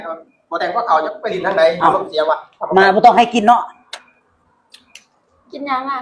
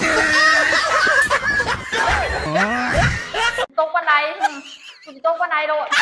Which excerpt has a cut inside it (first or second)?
second